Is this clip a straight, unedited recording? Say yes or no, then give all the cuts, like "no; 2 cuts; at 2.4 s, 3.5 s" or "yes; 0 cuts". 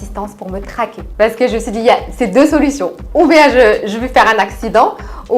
no; 1 cut; at 1.0 s